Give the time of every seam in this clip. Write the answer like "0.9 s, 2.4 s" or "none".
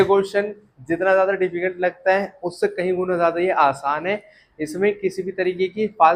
none